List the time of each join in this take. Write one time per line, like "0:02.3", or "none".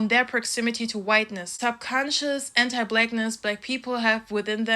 0:01.5